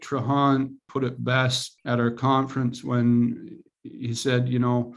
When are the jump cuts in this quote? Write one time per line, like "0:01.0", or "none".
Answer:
0:00.8
0:01.7

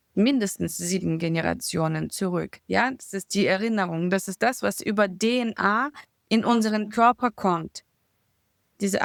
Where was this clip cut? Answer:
none

